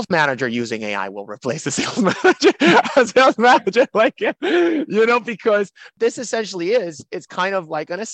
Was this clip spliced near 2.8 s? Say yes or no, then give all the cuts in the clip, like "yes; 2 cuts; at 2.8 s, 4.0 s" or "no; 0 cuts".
no; 1 cut; at 5.9 s